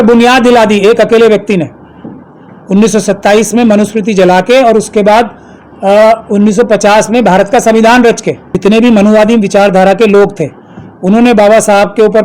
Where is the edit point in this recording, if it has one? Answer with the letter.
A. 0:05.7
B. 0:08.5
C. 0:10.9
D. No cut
B